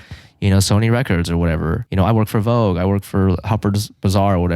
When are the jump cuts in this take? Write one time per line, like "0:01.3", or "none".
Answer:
0:01.8